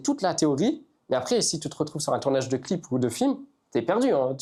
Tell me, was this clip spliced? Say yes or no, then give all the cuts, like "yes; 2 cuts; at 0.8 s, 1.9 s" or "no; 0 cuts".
no; 0 cuts